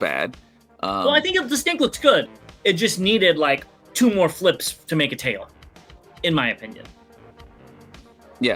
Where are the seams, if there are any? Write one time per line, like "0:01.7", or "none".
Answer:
none